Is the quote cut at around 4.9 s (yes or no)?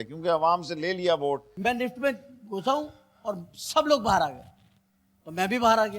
no